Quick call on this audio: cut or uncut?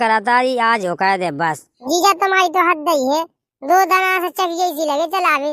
cut